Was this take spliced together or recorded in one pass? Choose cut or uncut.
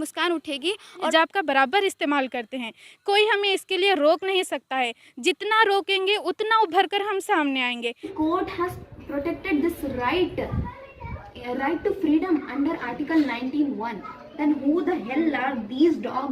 cut